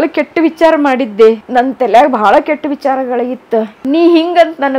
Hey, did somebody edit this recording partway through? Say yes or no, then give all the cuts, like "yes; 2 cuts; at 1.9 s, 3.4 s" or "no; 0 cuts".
yes; 2 cuts; at 1.4 s, 3.7 s